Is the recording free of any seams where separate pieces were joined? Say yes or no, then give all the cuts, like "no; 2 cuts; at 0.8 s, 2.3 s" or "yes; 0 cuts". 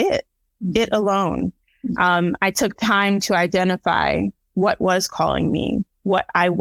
yes; 0 cuts